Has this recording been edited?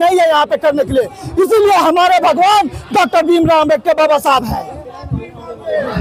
no; 0 cuts

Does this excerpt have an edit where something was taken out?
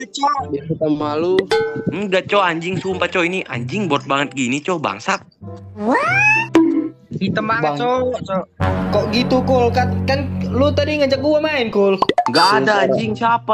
no; 0 cuts

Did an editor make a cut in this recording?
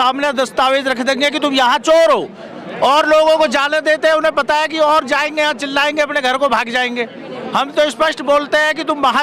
no; 0 cuts

